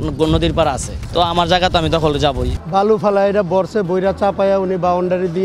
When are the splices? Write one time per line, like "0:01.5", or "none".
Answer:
0:00.9
0:02.5